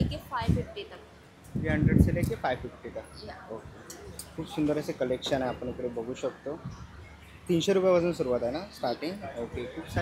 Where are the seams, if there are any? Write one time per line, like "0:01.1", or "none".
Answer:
none